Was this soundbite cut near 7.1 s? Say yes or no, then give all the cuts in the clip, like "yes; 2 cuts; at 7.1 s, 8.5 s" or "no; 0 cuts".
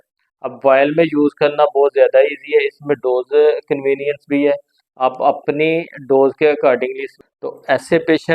yes; 1 cut; at 7.1 s